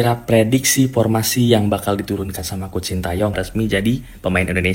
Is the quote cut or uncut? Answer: cut